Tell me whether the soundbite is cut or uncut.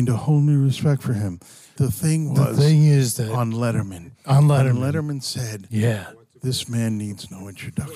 cut